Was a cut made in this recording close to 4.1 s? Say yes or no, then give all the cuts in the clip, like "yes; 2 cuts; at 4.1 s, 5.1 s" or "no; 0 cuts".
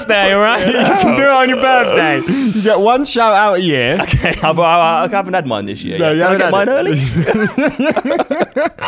yes; 1 cut; at 4.1 s